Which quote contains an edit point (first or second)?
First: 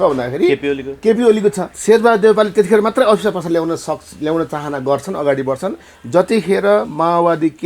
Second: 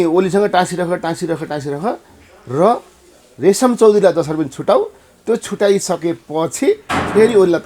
first